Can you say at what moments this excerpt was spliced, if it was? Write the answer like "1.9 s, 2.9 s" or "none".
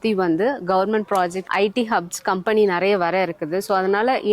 1.4 s